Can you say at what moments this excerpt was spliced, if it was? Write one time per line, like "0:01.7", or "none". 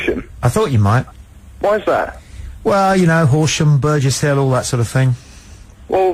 none